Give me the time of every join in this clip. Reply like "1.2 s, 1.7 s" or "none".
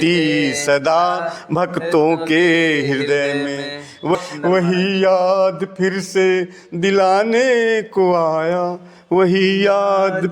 4.2 s

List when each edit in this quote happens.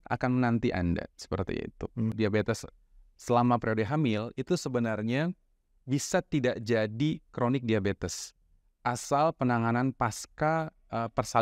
2.1 s

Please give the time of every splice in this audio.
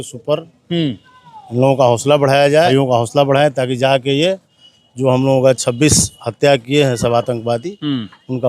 2.7 s

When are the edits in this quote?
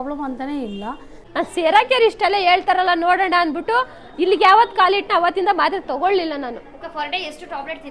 1.2 s

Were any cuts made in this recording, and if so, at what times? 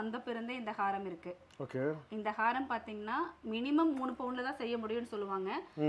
none

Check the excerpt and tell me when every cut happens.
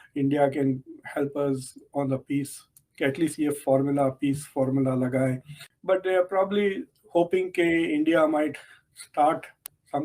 none

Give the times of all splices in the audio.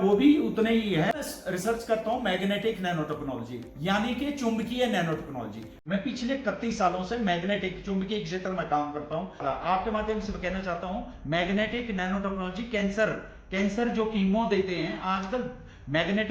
1.3 s, 9.4 s

